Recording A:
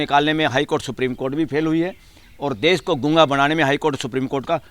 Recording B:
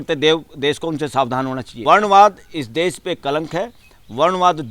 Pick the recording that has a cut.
B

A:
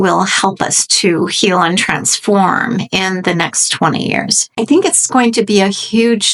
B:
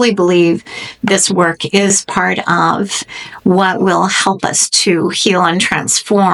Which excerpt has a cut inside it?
A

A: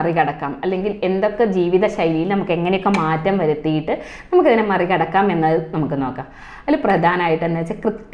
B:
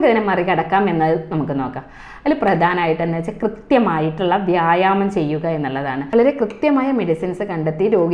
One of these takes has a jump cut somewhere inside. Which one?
B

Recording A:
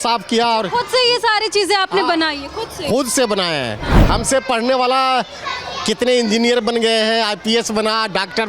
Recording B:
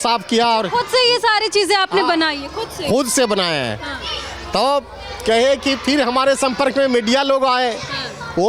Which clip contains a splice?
A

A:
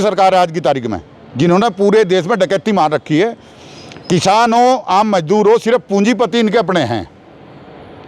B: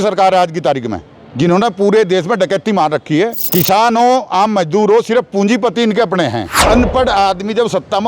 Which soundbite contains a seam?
B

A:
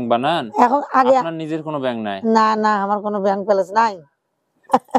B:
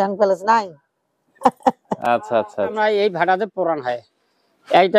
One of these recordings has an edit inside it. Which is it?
B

